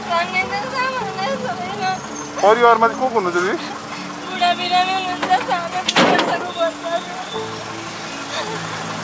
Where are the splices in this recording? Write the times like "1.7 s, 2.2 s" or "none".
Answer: none